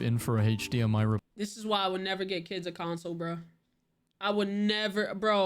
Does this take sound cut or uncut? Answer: cut